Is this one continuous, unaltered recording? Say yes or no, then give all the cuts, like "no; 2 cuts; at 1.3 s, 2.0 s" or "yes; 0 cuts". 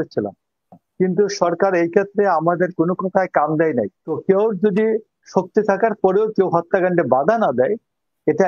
no; 1 cut; at 4.2 s